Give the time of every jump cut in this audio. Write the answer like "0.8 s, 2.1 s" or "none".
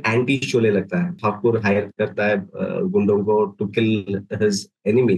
1.2 s